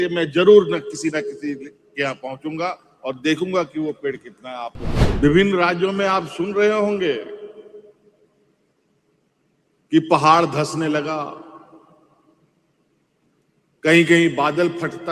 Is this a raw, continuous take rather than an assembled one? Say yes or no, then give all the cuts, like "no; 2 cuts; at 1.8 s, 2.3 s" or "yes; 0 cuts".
no; 1 cut; at 5.0 s